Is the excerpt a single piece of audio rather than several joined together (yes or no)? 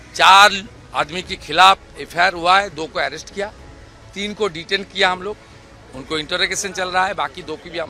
yes